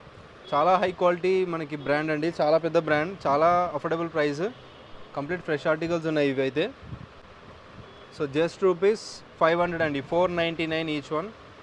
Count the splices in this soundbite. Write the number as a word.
zero